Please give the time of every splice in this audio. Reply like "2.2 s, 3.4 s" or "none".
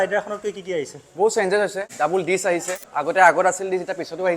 2.8 s